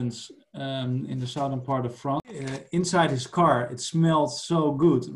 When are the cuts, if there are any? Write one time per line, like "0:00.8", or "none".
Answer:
0:02.2